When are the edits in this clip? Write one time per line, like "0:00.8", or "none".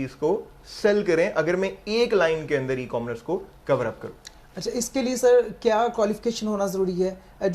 none